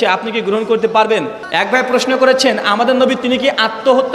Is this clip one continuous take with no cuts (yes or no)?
no